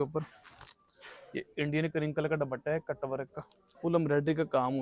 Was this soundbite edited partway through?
yes; 1 cut; at 3.6 s

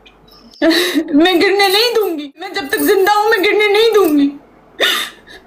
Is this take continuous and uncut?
no; 1 cut; at 2.6 s

